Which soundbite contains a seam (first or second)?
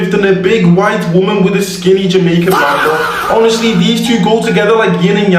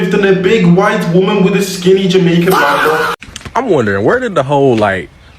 second